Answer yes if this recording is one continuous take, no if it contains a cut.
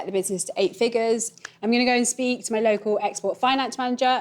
no